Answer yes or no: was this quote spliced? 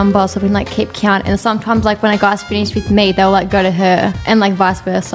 no